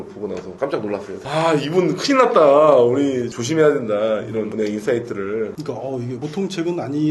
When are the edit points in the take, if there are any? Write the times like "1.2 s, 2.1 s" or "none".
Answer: 1.2 s, 5.5 s